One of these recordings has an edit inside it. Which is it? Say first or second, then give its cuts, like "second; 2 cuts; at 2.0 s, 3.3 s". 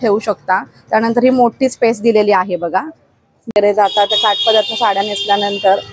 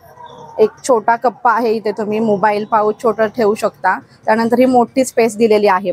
first; 1 cut; at 3.5 s